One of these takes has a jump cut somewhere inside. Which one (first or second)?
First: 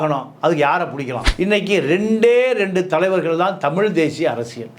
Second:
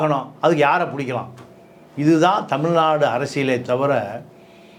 first